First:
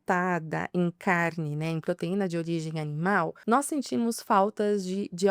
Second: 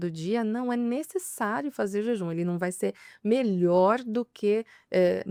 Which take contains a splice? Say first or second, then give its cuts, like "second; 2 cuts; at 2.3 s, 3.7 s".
first; 1 cut; at 3.4 s